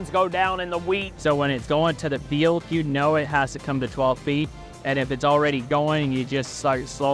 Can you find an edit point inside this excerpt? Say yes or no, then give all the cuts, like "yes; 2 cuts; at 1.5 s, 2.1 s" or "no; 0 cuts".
yes; 1 cut; at 1.1 s